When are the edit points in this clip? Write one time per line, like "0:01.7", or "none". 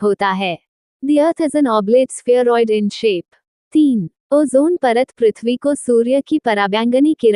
0:03.8